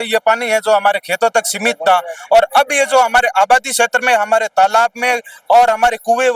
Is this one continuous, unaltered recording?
yes; 0 cuts

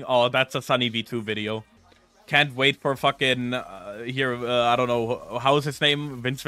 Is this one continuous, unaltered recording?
yes; 0 cuts

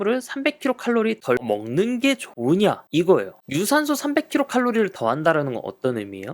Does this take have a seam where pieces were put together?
yes; 1 cut; at 3.3 s

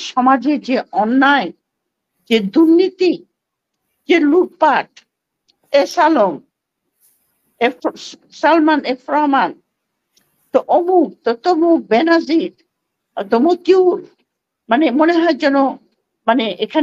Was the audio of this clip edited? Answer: no; 0 cuts

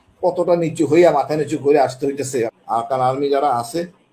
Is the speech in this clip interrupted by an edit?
yes; 1 cut; at 2.6 s

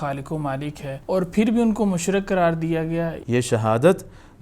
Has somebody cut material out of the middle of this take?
yes; 2 cuts; at 1.0 s, 3.2 s

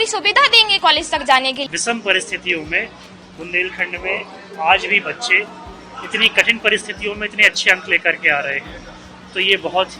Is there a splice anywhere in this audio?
yes; 1 cut; at 1.6 s

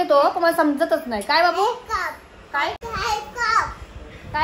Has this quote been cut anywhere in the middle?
yes; 1 cut; at 2.8 s

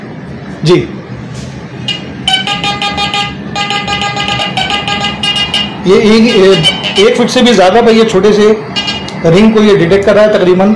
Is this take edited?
no; 0 cuts

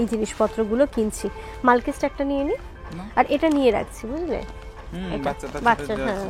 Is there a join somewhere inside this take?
no; 0 cuts

